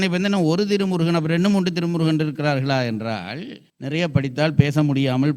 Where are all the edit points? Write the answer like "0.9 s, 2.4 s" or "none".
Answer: 3.6 s